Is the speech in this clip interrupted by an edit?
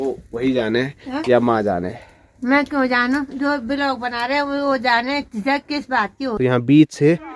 yes; 1 cut; at 6.2 s

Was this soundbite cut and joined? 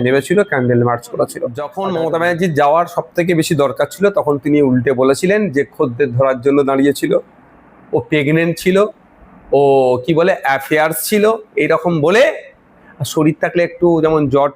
yes; 1 cut; at 1.7 s

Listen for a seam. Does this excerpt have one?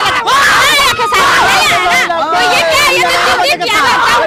no; 0 cuts

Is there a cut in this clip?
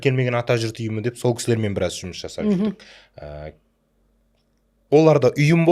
no; 0 cuts

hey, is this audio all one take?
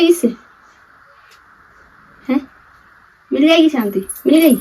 yes; 0 cuts

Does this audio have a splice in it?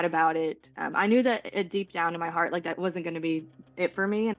no; 0 cuts

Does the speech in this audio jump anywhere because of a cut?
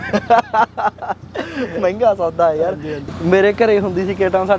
yes; 1 cut; at 3.1 s

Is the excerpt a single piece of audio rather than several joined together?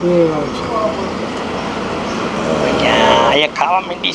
yes; 0 cuts

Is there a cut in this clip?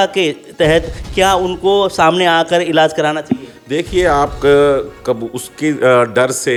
no; 0 cuts

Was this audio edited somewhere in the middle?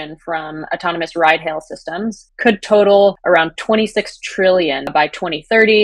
yes; 2 cuts; at 3.2 s, 4.9 s

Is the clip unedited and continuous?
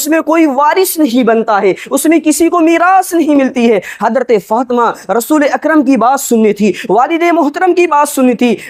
yes; 0 cuts

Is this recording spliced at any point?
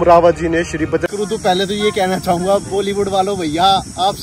yes; 1 cut; at 1.1 s

